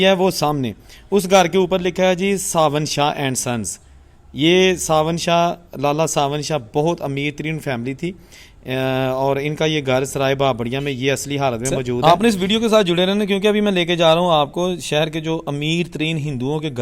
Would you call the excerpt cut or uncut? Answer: cut